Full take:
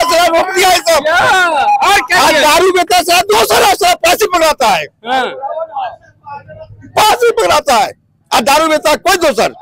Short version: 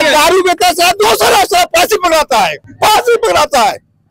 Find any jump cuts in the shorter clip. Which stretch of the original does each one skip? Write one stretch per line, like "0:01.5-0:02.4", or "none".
0:04.9-0:06.8